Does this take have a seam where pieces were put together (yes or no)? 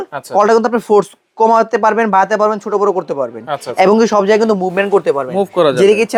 no